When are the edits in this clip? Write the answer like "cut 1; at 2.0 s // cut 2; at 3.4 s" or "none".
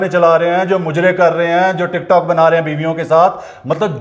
none